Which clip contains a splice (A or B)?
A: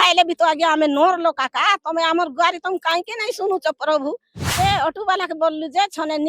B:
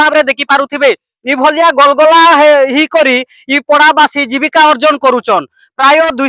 A